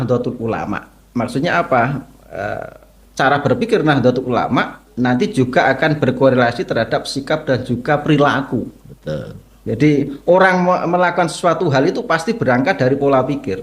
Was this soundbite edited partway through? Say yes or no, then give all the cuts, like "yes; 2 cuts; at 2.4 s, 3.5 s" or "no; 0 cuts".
no; 0 cuts